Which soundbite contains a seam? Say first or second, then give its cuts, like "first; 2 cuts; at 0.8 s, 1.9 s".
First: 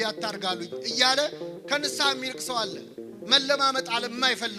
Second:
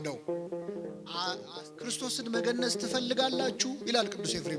second; 1 cut; at 1.5 s